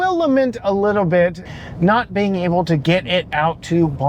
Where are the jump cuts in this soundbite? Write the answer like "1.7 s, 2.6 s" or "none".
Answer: 1.4 s